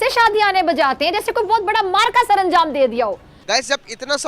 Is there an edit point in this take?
yes; 1 cut; at 3.3 s

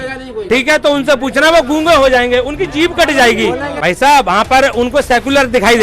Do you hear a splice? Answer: yes; 1 cut; at 3.7 s

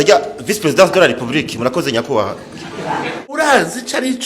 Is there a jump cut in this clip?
yes; 1 cut; at 3.4 s

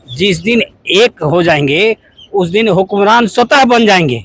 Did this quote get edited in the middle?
no; 0 cuts

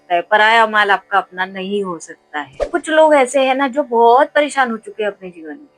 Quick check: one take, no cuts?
no; 1 cut; at 2.6 s

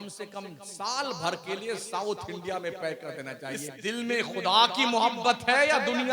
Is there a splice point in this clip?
yes; 1 cut; at 3.7 s

